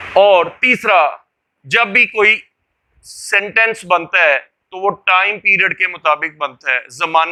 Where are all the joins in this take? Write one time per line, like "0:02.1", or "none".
none